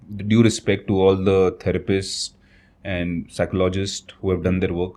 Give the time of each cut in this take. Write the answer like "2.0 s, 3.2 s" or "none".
none

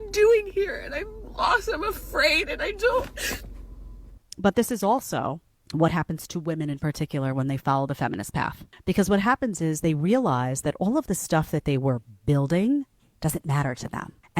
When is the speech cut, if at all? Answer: 4.2 s

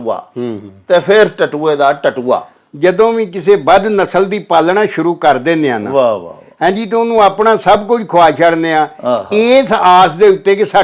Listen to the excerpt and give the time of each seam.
2.6 s

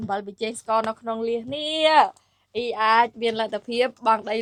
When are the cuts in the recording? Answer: none

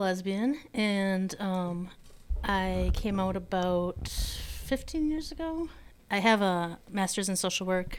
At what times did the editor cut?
5.9 s

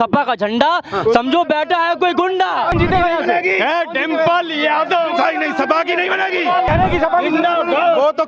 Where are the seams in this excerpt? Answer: 2.8 s, 6.7 s

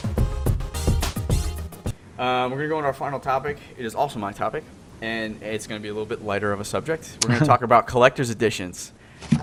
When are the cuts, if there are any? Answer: none

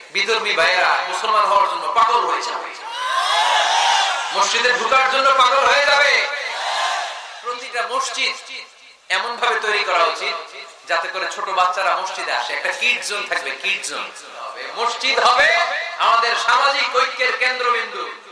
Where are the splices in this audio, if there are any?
7.4 s, 14.6 s

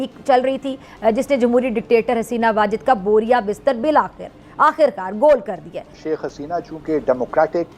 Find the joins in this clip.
6.0 s

